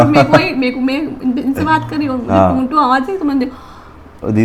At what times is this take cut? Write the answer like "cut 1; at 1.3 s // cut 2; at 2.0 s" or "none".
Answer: none